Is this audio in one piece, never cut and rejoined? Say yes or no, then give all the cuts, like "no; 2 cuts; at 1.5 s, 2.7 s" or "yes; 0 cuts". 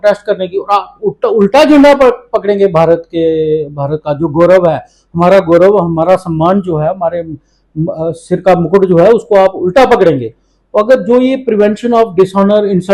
yes; 0 cuts